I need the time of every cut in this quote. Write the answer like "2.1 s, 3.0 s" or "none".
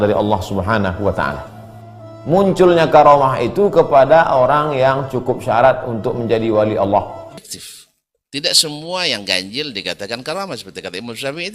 7.4 s